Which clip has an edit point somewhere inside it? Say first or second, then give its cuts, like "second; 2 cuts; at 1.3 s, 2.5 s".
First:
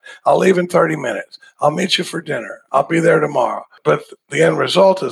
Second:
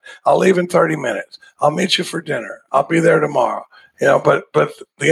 first; 1 cut; at 3.8 s